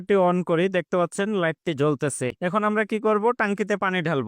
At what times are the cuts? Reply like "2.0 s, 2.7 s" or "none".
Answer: 2.3 s